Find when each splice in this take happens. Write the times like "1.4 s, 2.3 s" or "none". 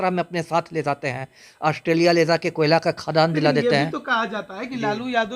none